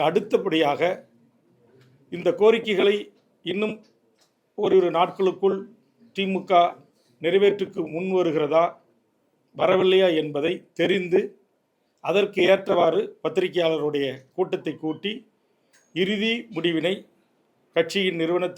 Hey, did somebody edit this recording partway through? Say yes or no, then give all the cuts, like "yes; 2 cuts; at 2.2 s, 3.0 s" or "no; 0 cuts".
no; 0 cuts